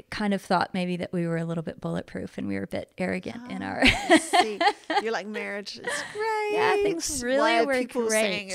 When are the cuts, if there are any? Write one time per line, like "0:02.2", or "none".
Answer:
none